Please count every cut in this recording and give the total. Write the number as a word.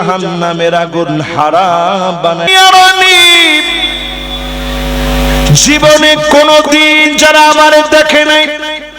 one